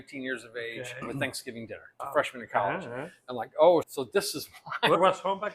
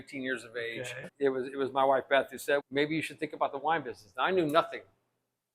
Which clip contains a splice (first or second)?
second